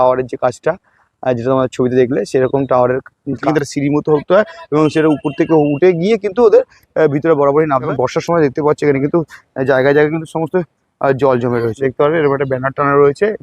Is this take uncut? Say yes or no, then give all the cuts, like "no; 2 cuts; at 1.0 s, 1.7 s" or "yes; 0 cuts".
no; 3 cuts; at 3.4 s, 7.9 s, 11.8 s